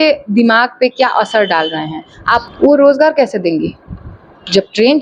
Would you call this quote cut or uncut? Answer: cut